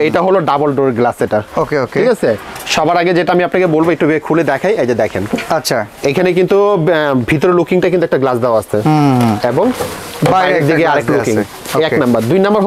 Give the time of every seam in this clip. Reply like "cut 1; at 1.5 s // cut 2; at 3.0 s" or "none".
none